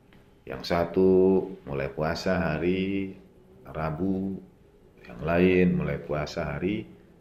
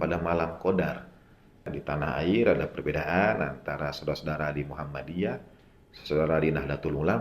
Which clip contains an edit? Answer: second; 1 cut; at 1.7 s

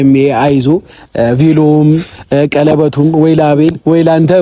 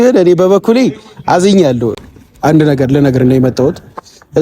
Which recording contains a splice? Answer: second; 1 cut; at 2.0 s

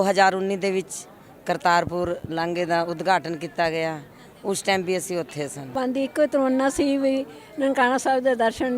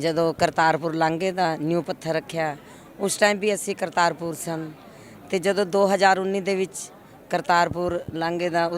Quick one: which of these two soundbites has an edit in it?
first; 1 cut; at 5.7 s

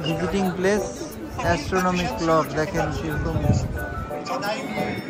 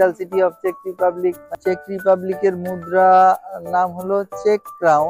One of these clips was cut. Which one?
second; 1 cut; at 1.4 s

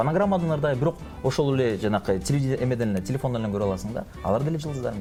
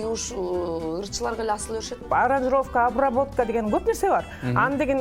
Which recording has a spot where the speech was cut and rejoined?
second; 1 cut; at 2.1 s

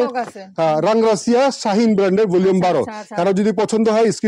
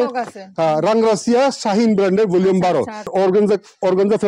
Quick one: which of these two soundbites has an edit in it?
second; 1 cut; at 3.1 s

